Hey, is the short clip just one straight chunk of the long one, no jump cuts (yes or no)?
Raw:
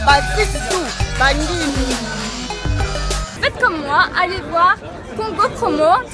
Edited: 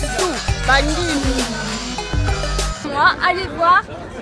no